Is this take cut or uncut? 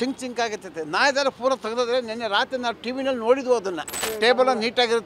cut